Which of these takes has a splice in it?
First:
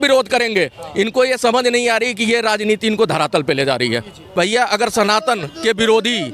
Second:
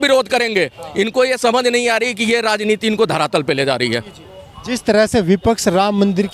first; 1 cut; at 4.2 s

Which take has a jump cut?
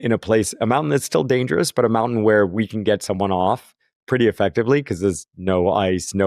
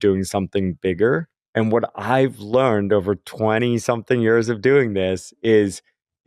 second; 1 cut; at 1.4 s

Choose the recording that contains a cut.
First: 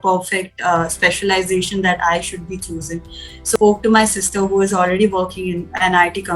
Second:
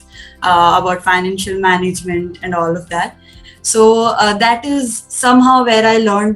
first; 1 cut; at 3.6 s

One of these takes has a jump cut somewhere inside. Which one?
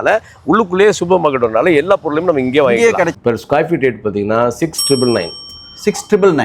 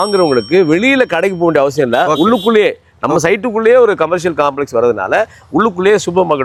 first; 1 cut; at 3.1 s

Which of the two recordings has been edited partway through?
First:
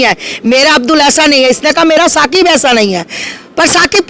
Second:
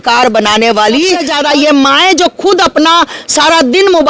second; 1 cut; at 1.2 s

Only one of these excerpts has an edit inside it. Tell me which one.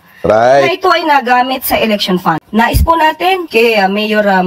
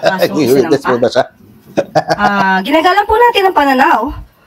first; 1 cut; at 2.4 s

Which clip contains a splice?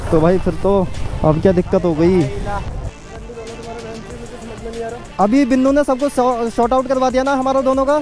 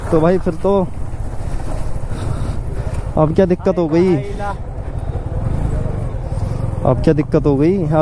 first; 3 cuts; at 1.0 s, 2.9 s, 5.0 s

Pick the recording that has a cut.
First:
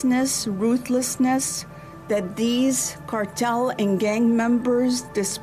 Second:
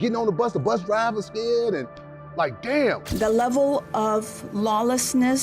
second; 1 cut; at 3.1 s

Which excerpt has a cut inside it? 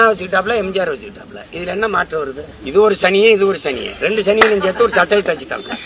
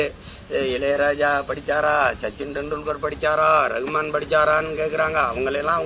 first; 1 cut; at 2.5 s

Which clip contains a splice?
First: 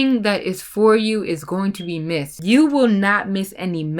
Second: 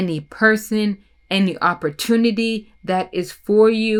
first; 1 cut; at 2.3 s

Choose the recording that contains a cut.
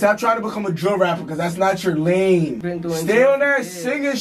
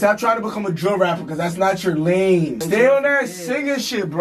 second; 1 cut; at 2.6 s

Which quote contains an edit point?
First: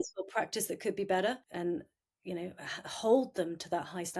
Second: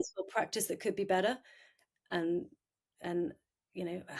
first; 1 cut; at 1.5 s

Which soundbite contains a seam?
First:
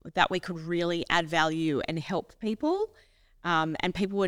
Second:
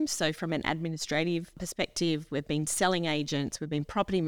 second; 1 cut; at 1.7 s

